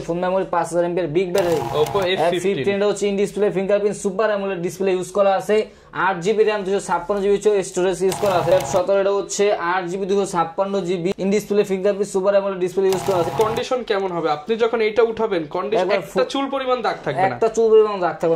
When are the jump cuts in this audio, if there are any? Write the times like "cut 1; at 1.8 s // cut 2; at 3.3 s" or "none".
cut 1; at 1.7 s // cut 2; at 8.5 s // cut 3; at 11.1 s // cut 4; at 13.3 s